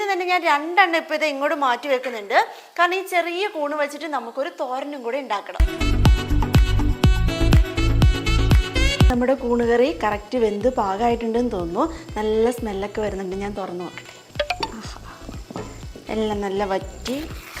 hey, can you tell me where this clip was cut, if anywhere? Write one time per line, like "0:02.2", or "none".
0:05.7
0:09.1
0:14.2